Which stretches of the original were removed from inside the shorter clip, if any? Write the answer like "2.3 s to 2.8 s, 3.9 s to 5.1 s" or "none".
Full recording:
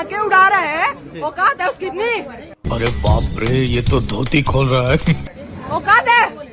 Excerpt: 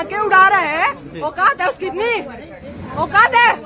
2.6 s to 5.3 s

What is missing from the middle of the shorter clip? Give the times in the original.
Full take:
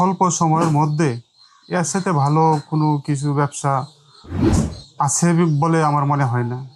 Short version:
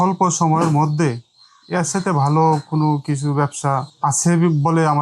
3.9 s to 4.9 s

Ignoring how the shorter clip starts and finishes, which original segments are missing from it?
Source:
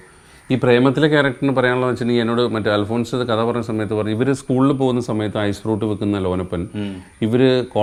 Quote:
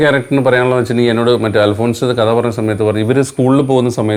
none

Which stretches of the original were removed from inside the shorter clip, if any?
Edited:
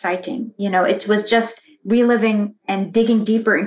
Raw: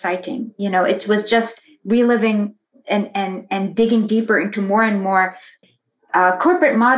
2.6 s to 3.4 s

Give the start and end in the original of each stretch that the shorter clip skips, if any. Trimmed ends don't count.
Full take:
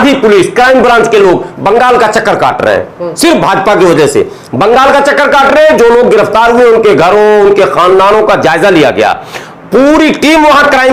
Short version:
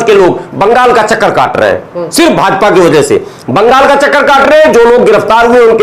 none

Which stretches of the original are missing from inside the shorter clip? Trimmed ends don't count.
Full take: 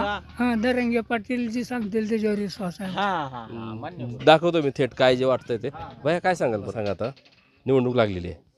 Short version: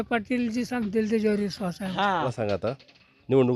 3.3 s to 6.7 s

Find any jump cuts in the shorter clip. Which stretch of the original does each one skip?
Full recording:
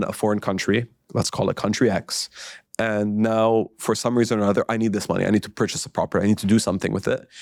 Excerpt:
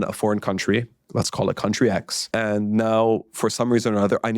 2.2 s to 2.6 s

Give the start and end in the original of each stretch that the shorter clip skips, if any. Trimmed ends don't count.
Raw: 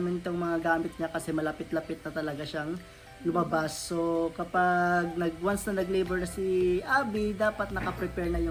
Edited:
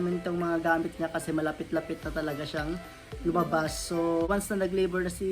4.3 s to 5.5 s

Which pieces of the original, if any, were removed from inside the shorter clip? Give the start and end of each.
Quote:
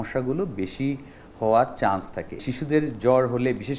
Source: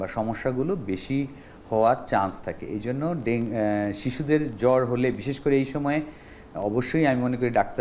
2.7 s to 4.0 s

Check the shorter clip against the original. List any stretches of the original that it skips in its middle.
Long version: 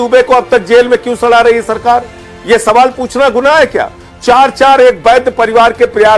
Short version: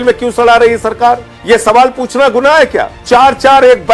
2.2 s to 2.3 s, 3.9 s to 4.1 s

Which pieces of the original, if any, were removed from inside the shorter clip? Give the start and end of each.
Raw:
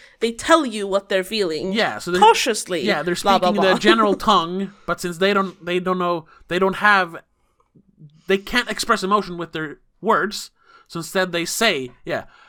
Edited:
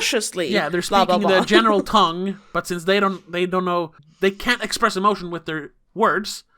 6.3 s to 8.1 s

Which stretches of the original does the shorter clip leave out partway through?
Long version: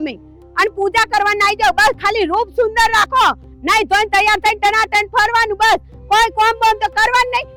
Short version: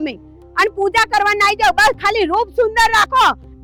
none

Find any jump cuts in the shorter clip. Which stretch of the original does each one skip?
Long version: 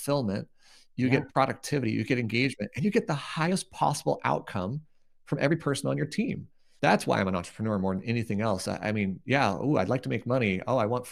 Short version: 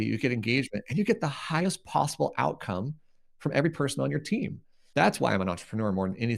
none

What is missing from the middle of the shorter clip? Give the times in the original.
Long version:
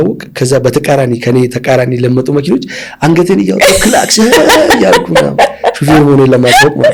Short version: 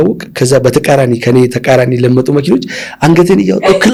none

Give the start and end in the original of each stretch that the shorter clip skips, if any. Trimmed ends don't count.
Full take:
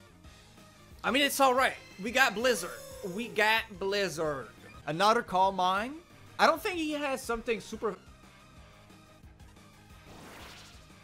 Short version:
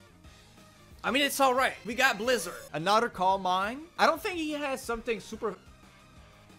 2.1 s to 4.3 s, 5.9 s to 6.2 s

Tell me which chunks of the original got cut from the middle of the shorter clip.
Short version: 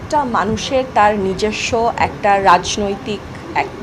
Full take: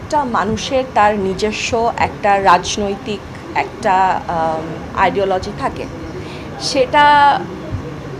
none

